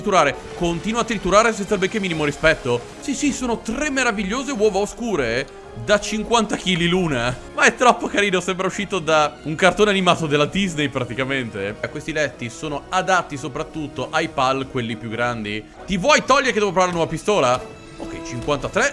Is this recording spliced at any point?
yes; 4 cuts; at 3.0 s, 7.4 s, 11.9 s, 15.7 s

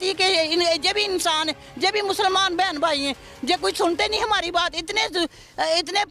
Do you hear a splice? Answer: no; 0 cuts

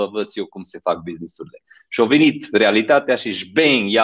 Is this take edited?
no; 0 cuts

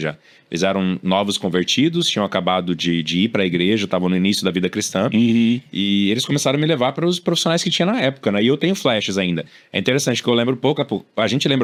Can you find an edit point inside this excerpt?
no; 0 cuts

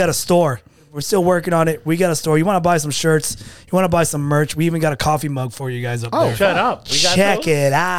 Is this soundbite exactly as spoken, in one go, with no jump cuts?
no; 1 cut; at 1.0 s

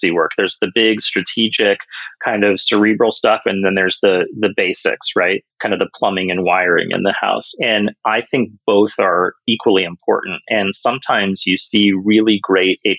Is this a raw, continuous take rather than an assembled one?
yes; 0 cuts

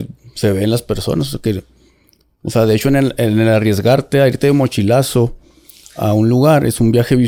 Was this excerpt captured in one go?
yes; 0 cuts

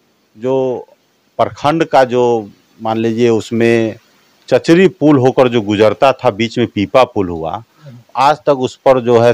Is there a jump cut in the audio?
no; 0 cuts

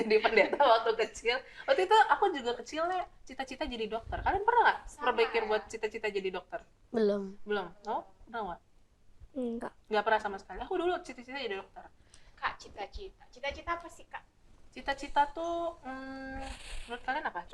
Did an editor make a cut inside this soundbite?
no; 0 cuts

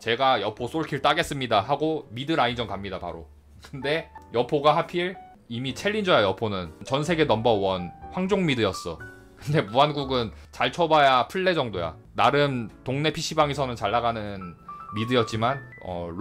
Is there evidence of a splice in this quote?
yes; 1 cut; at 6.8 s

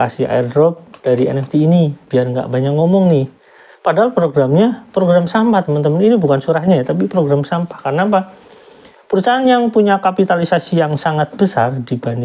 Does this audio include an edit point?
no; 0 cuts

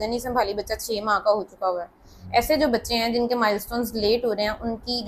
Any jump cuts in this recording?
no; 0 cuts

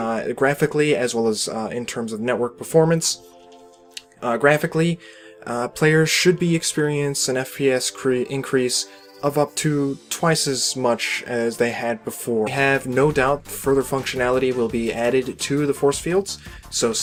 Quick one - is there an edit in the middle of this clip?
no; 0 cuts

